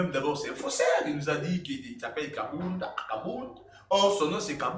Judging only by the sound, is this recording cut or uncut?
uncut